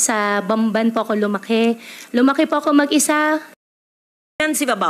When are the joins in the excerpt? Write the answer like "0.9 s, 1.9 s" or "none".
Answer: 3.8 s